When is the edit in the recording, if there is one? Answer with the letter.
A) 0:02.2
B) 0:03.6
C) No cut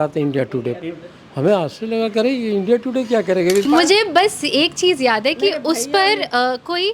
B